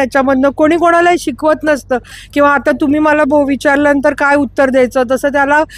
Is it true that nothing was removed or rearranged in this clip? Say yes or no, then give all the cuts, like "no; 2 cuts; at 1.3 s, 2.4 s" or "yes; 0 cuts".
yes; 0 cuts